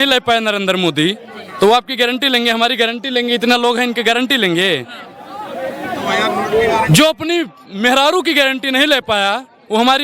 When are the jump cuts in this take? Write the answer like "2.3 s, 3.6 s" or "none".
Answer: none